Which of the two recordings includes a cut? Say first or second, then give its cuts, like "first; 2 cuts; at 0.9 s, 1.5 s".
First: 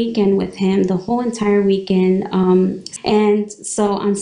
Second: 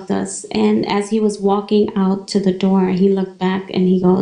first; 1 cut; at 2.8 s